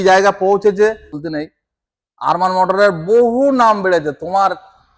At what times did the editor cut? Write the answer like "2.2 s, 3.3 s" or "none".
1.2 s